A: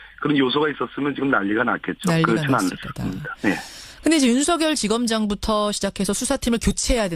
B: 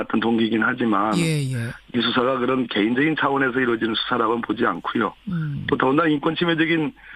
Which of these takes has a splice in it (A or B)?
B